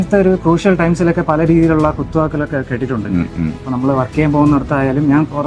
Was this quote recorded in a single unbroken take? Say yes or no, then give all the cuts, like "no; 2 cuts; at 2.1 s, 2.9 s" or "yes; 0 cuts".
no; 1 cut; at 3.6 s